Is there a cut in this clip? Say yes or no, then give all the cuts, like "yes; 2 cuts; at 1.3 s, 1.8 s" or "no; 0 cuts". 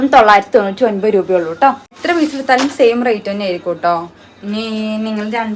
no; 0 cuts